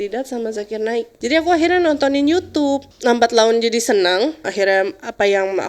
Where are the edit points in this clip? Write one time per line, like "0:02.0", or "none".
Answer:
0:01.1
0:02.9
0:04.5